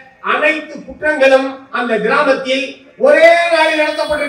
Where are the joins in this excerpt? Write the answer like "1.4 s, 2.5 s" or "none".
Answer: none